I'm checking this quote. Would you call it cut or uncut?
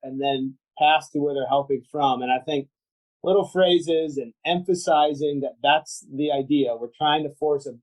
uncut